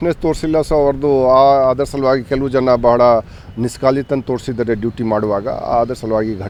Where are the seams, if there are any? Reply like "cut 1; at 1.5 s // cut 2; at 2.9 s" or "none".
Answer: none